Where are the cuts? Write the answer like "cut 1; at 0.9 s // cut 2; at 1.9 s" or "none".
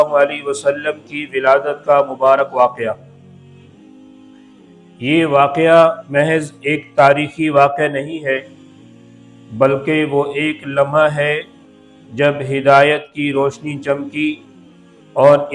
none